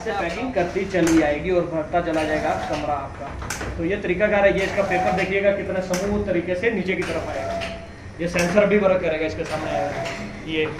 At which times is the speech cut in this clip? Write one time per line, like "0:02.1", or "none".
none